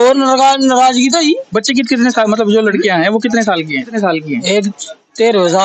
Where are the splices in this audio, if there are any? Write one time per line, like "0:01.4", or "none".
0:03.9